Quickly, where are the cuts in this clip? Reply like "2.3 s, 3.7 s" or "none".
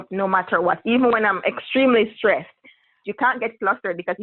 3.0 s